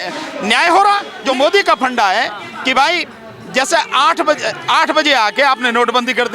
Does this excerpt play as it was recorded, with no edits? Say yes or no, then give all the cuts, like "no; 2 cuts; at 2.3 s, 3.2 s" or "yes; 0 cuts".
no; 1 cut; at 1.1 s